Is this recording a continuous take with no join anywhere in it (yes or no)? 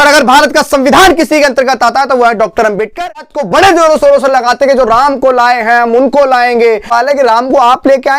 no